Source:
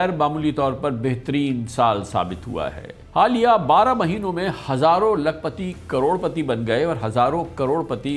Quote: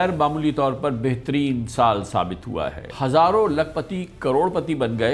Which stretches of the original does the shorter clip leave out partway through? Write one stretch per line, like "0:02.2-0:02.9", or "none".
0:02.9-0:04.6